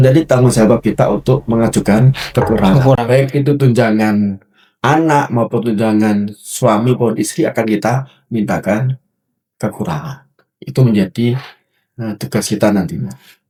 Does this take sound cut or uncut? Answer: uncut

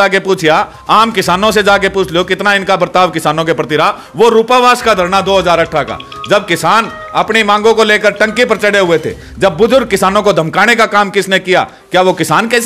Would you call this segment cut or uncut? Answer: uncut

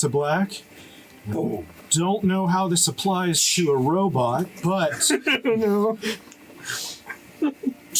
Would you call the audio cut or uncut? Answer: uncut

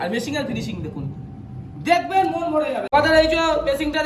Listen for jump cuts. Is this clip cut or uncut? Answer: cut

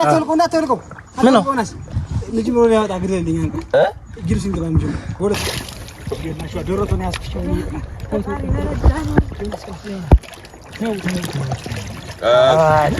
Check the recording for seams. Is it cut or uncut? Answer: cut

